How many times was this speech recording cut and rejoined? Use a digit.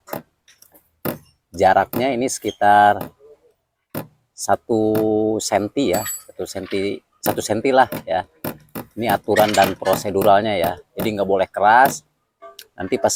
0